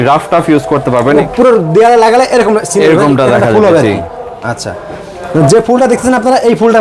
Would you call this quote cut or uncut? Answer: cut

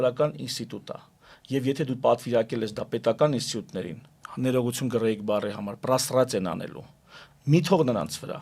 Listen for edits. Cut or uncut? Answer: uncut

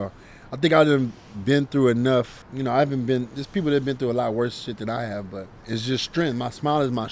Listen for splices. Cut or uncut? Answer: cut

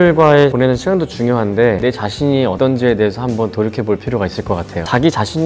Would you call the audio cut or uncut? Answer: uncut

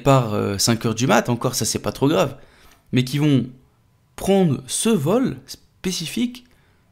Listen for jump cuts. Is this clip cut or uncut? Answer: uncut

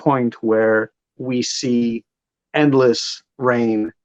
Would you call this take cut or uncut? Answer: cut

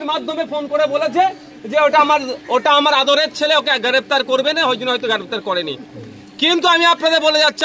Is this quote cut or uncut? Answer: uncut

